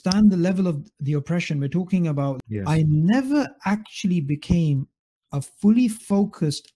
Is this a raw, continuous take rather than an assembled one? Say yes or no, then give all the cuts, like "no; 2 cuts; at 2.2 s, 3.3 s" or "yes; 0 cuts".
no; 1 cut; at 2.4 s